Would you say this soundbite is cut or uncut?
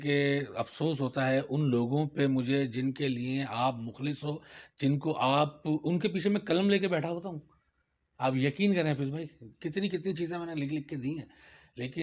uncut